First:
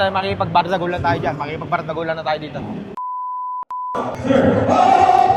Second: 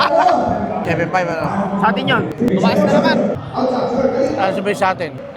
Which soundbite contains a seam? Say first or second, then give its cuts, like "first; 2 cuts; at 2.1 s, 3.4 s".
second; 1 cut; at 2.3 s